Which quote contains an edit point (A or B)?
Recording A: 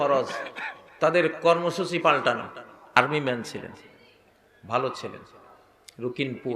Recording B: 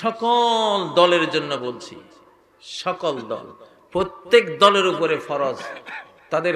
A